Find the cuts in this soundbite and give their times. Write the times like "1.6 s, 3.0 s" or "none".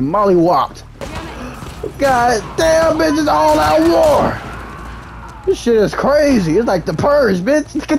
1.1 s